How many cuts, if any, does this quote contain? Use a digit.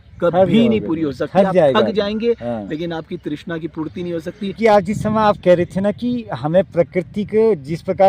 0